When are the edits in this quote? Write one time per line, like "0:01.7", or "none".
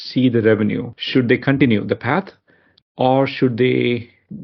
0:00.9